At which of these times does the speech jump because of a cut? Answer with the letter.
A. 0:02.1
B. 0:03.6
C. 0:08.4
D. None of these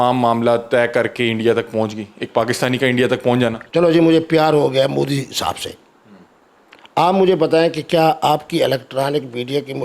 B